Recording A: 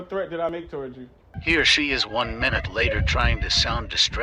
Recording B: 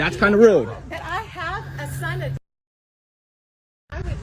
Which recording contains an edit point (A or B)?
A